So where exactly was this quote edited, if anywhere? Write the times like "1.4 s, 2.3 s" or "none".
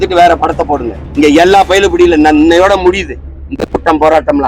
1.0 s